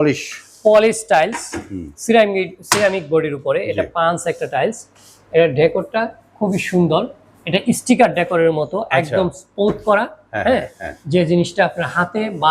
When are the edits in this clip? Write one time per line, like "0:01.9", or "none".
none